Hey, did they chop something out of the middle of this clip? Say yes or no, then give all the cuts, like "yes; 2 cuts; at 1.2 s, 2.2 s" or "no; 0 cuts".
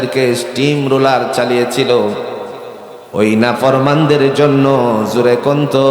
no; 0 cuts